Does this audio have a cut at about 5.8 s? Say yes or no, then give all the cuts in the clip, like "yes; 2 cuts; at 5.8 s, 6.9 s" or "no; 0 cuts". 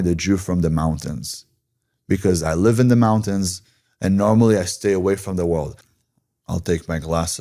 yes; 1 cut; at 5.8 s